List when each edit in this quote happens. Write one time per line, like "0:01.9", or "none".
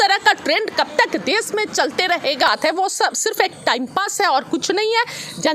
0:02.5